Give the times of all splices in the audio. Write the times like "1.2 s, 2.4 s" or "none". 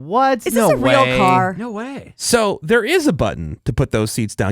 1.6 s